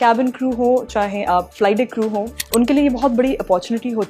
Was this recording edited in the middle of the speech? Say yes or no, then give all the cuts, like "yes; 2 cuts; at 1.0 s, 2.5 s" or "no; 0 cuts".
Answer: yes; 2 cuts; at 1.5 s, 2.4 s